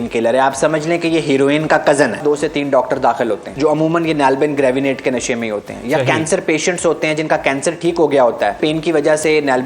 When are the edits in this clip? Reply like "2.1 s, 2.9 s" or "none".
2.2 s, 3.5 s, 8.6 s